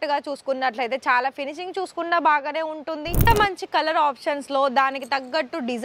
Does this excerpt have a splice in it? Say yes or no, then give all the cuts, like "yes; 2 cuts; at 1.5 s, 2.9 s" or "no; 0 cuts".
yes; 1 cut; at 3.2 s